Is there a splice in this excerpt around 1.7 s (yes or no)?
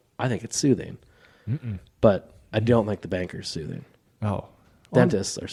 no